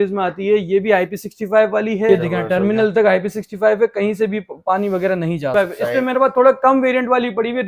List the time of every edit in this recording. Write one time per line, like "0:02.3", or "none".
0:02.1
0:05.5

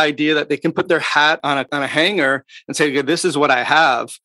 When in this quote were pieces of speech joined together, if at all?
0:01.6

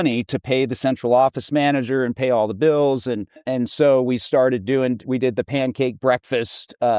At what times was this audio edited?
0:03.4

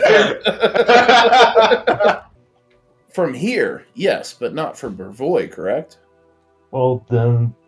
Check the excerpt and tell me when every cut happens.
0:02.4

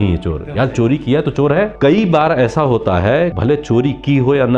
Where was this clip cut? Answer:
0:01.7
0:03.4

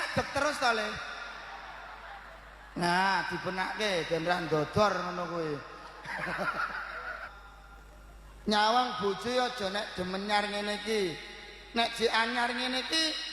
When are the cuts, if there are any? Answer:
0:07.3

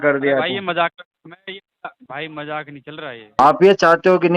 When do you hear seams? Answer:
0:03.4

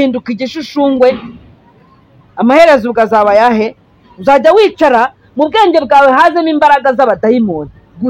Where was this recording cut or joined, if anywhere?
none

